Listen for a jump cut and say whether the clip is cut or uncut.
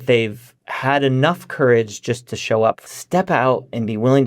cut